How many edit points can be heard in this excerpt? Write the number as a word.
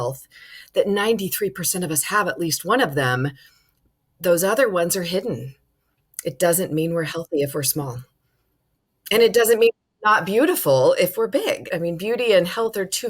one